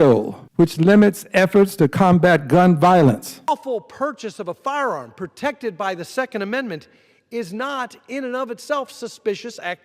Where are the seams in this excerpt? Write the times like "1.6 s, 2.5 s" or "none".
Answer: 3.3 s